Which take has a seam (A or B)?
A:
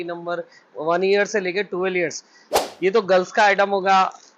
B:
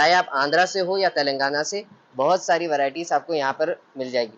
A